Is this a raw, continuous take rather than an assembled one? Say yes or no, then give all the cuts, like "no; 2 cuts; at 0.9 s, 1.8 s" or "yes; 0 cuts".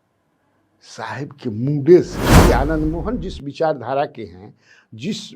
no; 1 cut; at 2.4 s